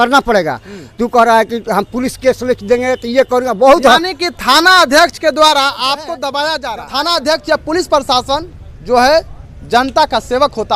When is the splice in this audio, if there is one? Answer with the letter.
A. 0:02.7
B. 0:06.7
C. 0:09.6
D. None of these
B